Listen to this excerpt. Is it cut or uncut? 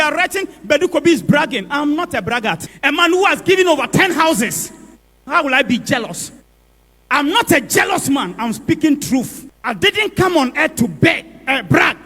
cut